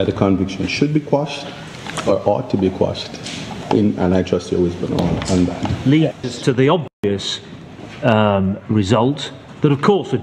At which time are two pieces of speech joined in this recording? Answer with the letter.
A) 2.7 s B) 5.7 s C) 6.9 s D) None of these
B